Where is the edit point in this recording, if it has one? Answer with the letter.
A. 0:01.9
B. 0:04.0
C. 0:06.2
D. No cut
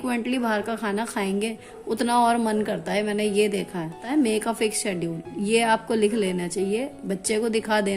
B